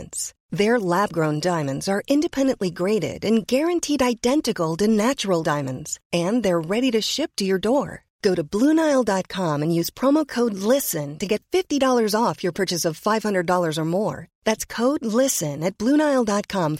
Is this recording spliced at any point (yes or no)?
no